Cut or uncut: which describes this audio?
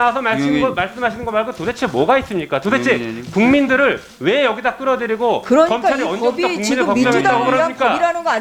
uncut